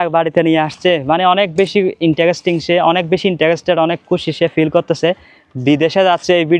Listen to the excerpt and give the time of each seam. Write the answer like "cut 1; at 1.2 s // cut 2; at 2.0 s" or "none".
none